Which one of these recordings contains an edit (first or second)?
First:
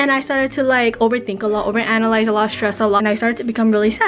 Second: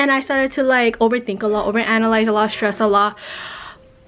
first